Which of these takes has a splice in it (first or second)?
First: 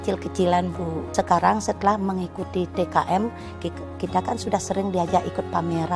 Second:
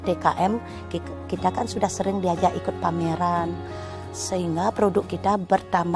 first